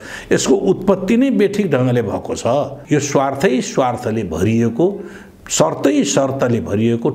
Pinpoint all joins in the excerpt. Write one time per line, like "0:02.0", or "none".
0:02.8

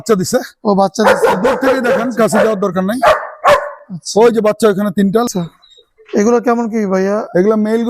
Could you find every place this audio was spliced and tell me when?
0:05.3

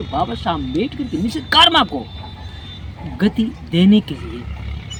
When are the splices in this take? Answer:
none

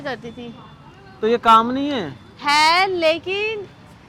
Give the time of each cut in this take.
none

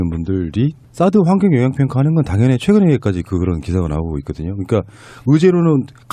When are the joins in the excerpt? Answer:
none

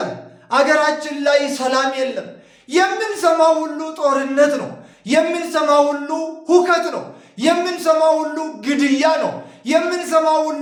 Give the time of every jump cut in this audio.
none

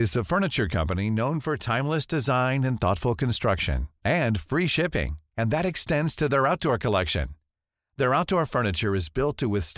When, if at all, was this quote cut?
none

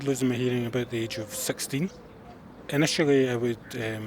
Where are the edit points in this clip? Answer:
0:02.5

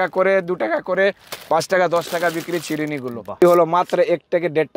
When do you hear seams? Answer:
0:03.4

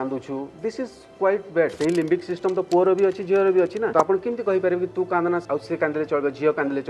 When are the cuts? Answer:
0:01.7
0:03.9
0:05.4

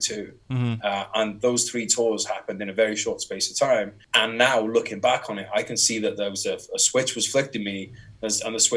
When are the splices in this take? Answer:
0:04.0

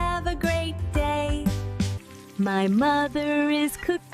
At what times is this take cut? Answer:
0:02.0

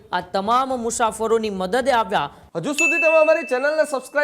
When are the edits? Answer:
0:02.4

